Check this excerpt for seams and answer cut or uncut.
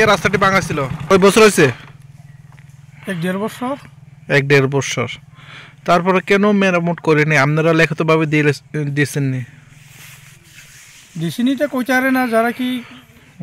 cut